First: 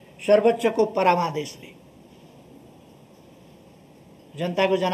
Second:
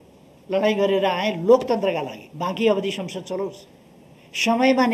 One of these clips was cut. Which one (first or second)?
second